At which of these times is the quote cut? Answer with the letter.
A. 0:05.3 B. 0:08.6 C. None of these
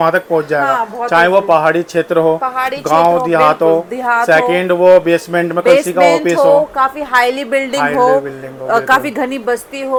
C